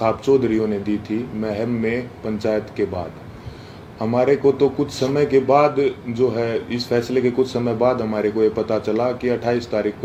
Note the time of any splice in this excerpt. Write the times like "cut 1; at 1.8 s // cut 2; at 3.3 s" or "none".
none